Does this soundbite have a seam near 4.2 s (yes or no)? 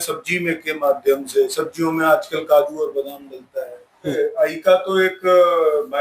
yes